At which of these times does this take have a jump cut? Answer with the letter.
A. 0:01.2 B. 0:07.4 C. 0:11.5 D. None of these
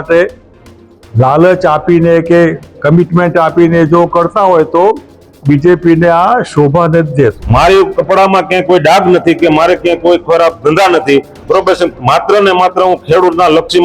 B